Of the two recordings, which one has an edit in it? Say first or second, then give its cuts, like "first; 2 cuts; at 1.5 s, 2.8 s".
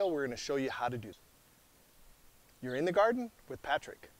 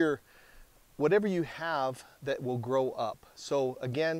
first; 1 cut; at 1.2 s